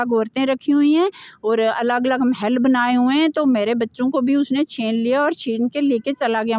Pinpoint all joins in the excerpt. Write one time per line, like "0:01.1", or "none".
none